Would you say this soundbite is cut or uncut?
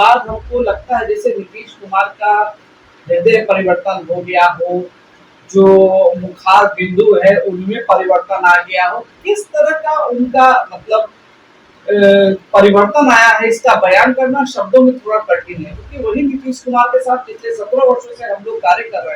uncut